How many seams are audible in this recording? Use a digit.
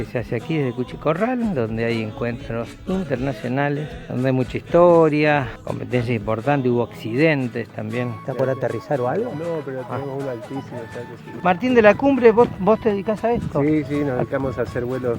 3